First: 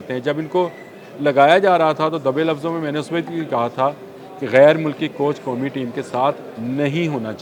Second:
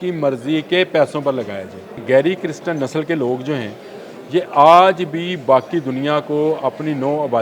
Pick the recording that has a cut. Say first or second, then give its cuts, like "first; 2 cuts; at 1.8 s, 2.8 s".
second; 1 cut; at 2.0 s